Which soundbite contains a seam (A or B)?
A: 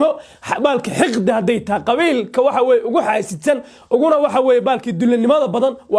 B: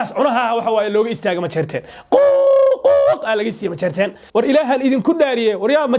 B